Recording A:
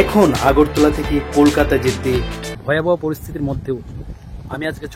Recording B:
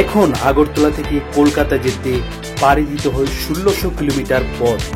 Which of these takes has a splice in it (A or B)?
A